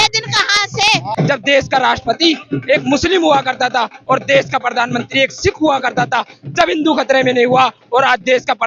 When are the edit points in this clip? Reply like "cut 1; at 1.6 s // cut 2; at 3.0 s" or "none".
cut 1; at 1.1 s